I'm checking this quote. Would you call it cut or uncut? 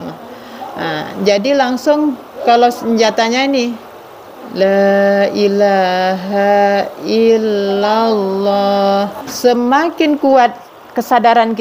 cut